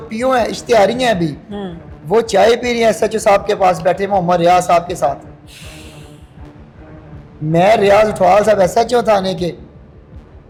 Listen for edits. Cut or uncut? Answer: uncut